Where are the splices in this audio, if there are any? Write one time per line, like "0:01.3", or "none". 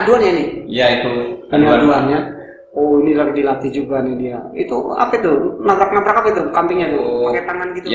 0:06.4